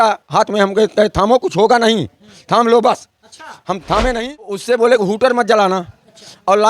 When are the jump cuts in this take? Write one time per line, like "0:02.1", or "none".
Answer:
0:04.6